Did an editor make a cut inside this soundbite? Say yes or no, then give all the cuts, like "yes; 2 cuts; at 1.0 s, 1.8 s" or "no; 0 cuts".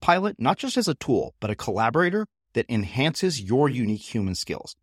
no; 0 cuts